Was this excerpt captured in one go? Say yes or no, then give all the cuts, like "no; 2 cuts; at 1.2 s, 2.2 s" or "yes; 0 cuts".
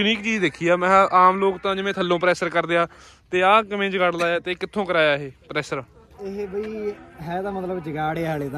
yes; 0 cuts